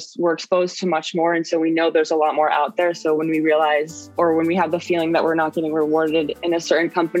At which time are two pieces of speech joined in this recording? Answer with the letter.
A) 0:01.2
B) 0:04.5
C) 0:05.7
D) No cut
D